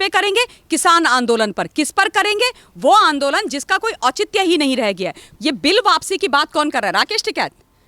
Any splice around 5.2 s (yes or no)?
yes